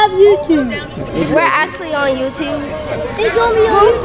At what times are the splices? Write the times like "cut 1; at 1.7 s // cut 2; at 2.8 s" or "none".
cut 1; at 1.2 s // cut 2; at 3.1 s